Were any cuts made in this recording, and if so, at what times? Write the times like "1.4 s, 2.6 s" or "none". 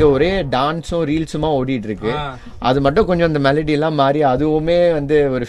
none